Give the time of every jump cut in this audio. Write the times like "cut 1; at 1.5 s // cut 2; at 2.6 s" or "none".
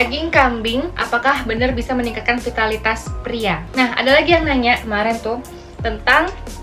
cut 1; at 3.6 s